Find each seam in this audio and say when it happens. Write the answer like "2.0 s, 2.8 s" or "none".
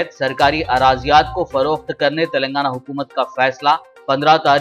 none

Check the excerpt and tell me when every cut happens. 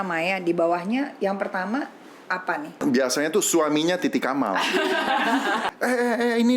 2.8 s, 5.7 s

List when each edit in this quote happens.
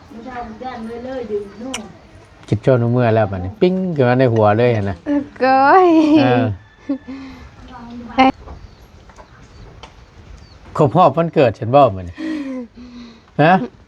8.3 s

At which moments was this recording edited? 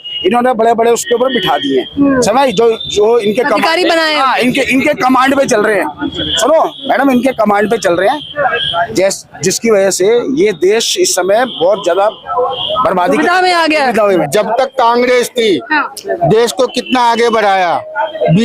14.2 s

